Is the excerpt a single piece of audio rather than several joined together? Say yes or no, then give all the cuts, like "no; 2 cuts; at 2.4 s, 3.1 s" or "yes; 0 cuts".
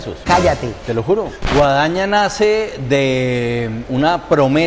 no; 1 cut; at 1.3 s